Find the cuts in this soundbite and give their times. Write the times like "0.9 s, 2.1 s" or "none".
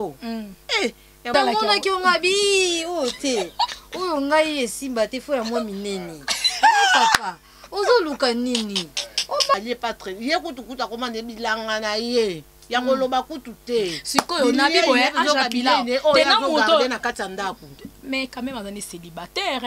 1.3 s, 9.5 s